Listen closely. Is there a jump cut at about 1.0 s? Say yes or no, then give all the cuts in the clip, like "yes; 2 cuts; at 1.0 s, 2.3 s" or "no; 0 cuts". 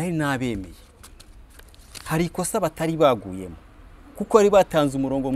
no; 0 cuts